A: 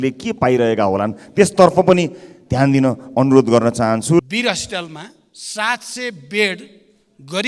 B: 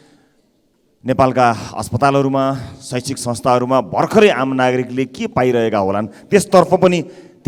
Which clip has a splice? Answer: A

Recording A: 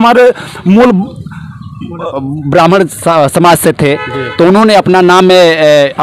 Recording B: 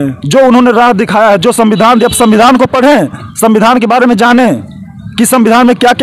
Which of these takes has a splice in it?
A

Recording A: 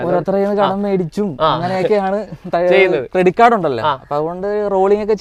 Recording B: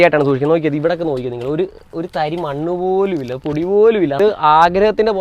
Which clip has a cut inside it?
B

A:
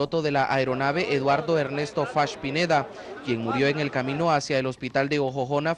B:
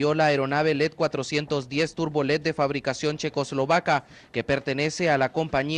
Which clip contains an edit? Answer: A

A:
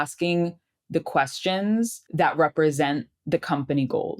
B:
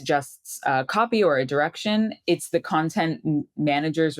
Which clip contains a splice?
A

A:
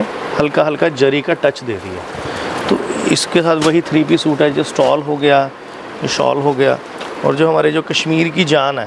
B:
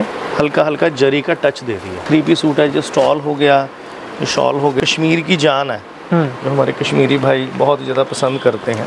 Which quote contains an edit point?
B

